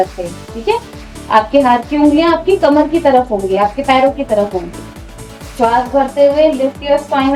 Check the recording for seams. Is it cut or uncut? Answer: uncut